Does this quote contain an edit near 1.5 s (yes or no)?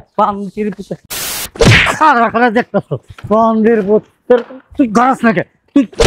yes